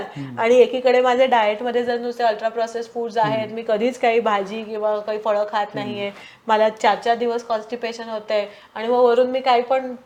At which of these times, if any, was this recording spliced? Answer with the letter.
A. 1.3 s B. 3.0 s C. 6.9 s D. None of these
D